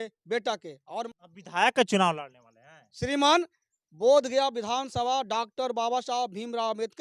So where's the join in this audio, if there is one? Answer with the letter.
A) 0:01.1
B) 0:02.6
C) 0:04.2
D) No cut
A